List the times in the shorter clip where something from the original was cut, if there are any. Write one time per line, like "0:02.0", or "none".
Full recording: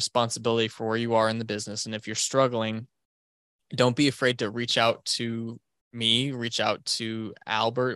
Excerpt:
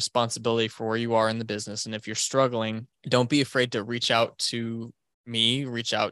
0:02.9

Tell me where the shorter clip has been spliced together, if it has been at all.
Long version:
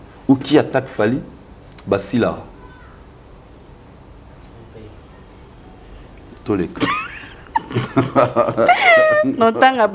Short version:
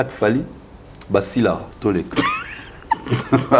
0:01.7

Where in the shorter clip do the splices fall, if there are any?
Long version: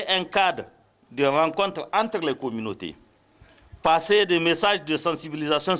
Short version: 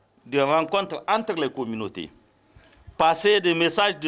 none

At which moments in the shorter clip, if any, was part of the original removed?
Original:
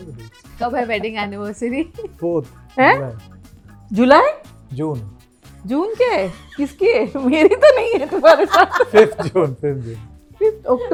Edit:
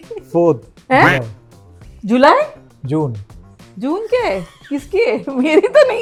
none

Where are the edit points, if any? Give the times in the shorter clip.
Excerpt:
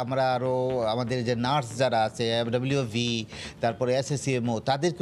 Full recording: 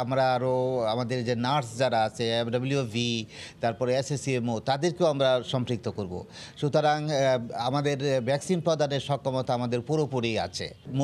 none

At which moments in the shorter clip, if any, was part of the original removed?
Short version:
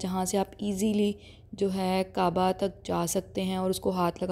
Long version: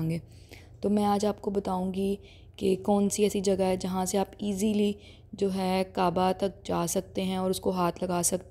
none

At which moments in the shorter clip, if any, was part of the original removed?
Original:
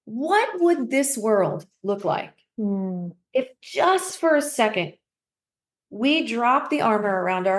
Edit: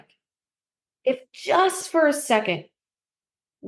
none

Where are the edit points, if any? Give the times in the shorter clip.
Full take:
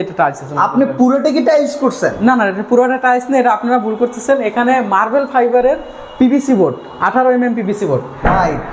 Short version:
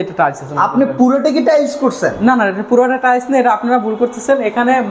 none

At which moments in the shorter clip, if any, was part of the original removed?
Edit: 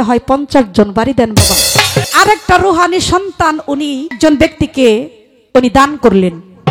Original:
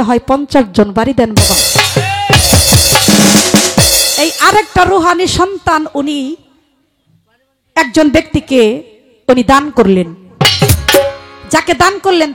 0:02.1
0:04.1

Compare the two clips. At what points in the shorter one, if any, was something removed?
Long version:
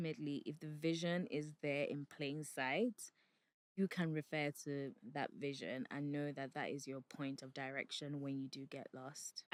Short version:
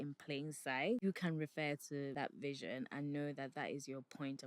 0:01.0
0:02.1

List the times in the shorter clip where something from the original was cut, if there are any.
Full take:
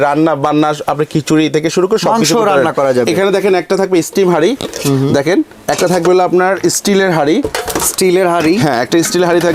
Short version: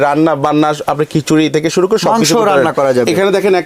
none

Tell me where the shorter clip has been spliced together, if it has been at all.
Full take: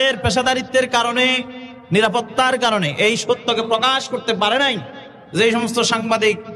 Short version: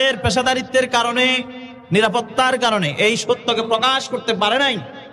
none

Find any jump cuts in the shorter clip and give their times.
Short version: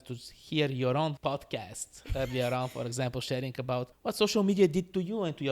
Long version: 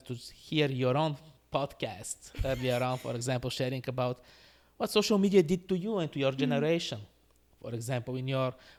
0:01.2
0:03.9

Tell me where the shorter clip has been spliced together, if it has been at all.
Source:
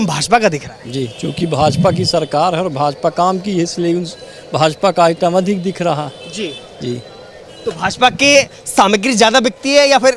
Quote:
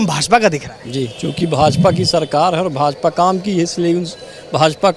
none

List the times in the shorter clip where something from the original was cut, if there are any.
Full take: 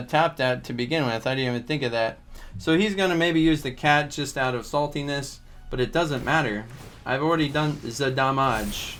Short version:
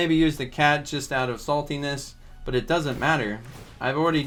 none

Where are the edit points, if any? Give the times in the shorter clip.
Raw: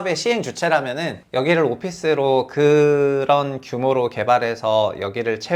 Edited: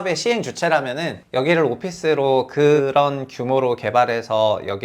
0:02.8

